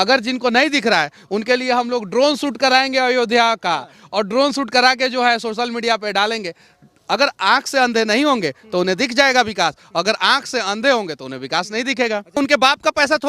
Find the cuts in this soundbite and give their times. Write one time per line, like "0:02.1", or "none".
0:12.4